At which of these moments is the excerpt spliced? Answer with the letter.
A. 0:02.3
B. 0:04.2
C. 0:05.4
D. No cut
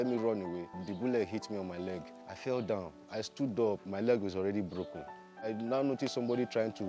C